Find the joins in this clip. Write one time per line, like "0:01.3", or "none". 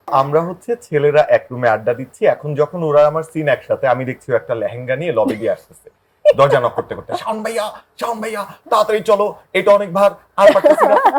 none